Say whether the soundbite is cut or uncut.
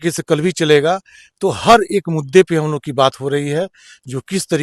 uncut